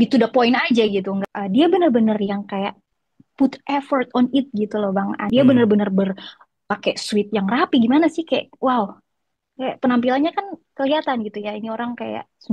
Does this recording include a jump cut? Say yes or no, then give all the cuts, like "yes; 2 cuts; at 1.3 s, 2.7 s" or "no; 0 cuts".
yes; 2 cuts; at 1.2 s, 5.2 s